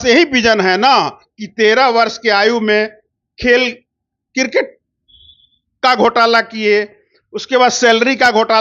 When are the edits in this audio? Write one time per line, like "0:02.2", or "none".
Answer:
none